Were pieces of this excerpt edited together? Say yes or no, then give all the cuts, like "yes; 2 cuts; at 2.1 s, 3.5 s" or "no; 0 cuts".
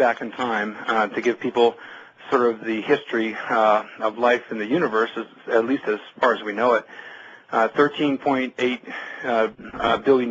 yes; 1 cut; at 7.1 s